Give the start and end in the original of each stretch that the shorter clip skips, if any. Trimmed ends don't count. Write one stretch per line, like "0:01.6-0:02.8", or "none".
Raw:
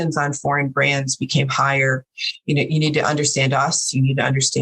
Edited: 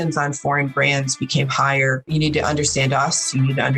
0:02.1-0:02.7